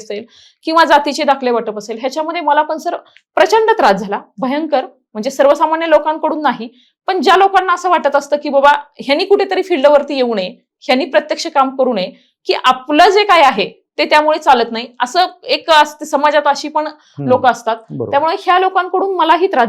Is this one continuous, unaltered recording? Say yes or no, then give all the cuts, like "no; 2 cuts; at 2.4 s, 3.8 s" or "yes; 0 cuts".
yes; 0 cuts